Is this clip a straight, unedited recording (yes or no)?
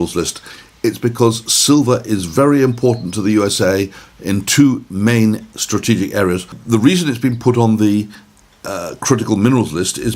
no